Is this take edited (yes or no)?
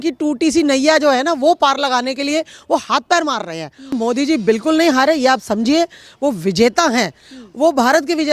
yes